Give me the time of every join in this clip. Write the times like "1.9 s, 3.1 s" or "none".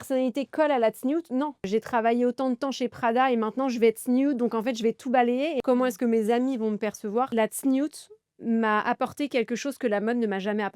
1.6 s, 5.6 s, 7.3 s